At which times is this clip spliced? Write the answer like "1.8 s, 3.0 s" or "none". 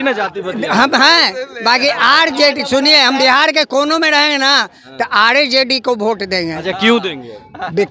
none

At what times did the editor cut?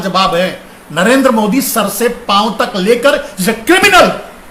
none

